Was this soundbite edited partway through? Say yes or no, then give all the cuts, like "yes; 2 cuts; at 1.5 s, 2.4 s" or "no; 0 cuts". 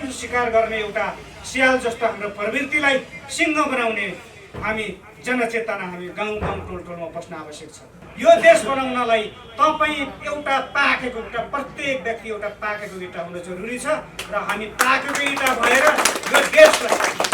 yes; 1 cut; at 8.0 s